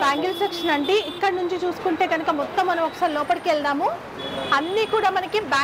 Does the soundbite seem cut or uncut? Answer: uncut